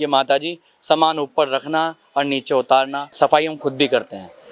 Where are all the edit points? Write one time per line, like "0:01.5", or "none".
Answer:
0:03.0